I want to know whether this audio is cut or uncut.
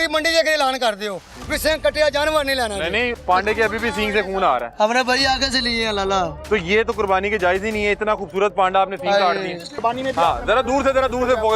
cut